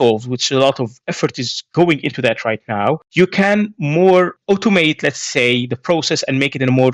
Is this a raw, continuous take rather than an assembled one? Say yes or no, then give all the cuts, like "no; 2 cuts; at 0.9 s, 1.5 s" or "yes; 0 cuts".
yes; 0 cuts